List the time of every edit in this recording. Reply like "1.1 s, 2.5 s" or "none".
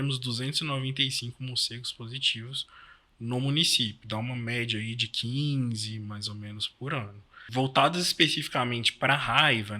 7.5 s